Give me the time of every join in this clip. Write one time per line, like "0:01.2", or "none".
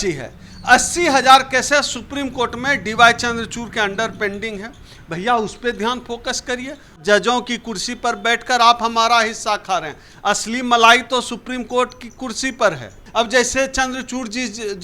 0:07.0
0:12.9